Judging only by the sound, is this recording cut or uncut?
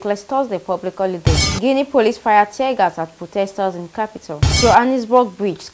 cut